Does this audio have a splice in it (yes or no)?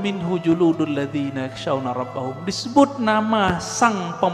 no